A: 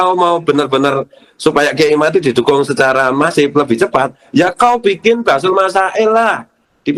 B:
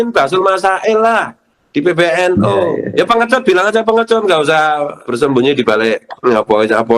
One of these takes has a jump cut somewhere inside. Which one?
B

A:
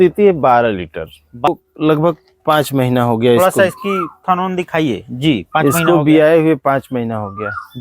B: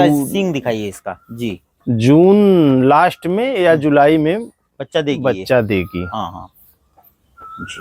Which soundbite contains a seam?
A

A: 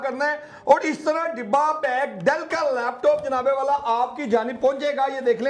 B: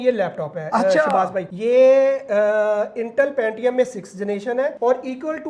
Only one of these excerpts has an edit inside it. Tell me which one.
B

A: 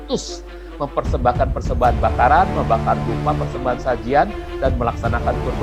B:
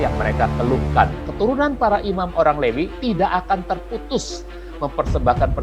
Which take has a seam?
B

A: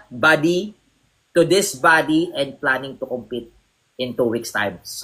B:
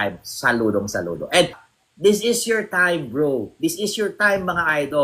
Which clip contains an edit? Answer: B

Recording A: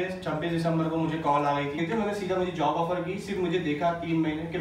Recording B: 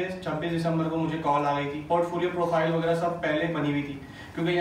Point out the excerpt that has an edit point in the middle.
A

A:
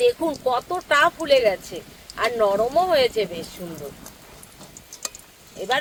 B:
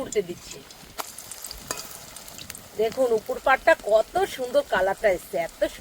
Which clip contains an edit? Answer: B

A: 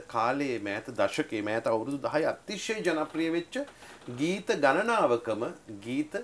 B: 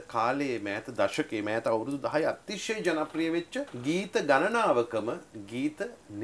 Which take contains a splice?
B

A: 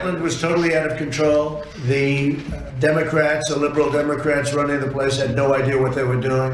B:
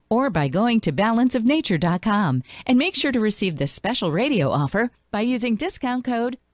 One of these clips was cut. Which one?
A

